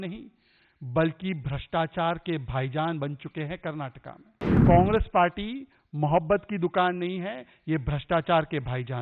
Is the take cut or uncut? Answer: cut